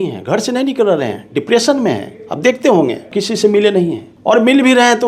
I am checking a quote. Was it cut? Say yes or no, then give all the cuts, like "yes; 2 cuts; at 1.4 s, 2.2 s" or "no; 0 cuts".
yes; 2 cuts; at 3.1 s, 4.1 s